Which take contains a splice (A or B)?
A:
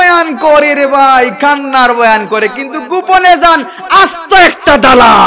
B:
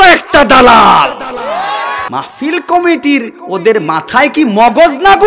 B